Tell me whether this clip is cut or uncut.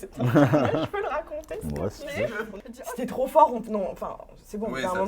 cut